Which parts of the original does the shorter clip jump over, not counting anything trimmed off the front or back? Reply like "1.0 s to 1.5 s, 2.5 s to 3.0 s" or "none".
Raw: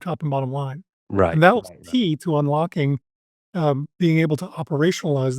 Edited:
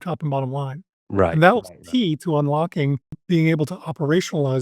3.2 s to 3.9 s